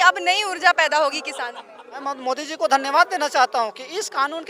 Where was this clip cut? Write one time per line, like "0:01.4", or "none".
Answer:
0:01.9